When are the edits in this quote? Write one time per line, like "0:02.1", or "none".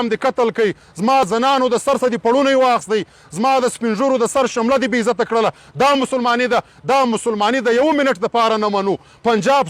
0:01.2